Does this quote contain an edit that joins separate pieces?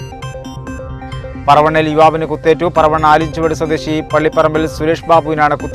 yes; 1 cut; at 1.0 s

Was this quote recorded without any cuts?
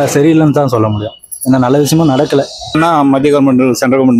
no; 1 cut; at 2.7 s

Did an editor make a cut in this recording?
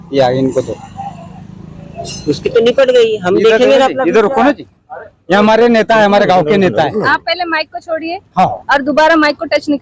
no; 0 cuts

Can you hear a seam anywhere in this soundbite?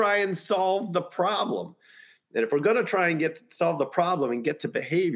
no; 0 cuts

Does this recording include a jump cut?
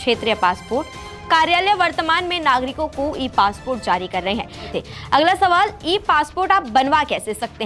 yes; 1 cut; at 4.7 s

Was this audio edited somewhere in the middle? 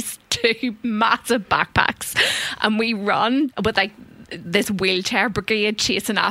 yes; 1 cut; at 3.5 s

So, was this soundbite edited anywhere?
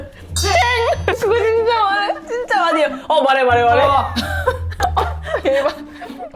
yes; 2 cuts; at 1.2 s, 4.7 s

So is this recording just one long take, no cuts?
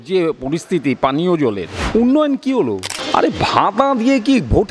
no; 2 cuts; at 1.7 s, 2.9 s

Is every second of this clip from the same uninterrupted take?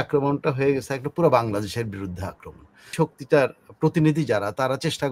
no; 1 cut; at 2.9 s

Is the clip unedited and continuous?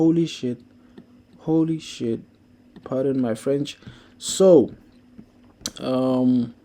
yes; 0 cuts

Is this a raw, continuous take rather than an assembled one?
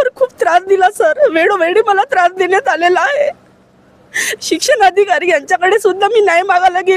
yes; 0 cuts

